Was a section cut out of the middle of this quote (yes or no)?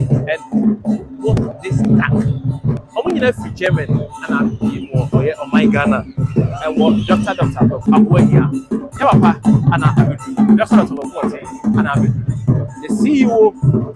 yes